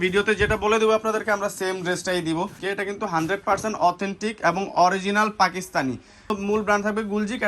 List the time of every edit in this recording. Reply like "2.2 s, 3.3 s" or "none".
2.6 s, 6.3 s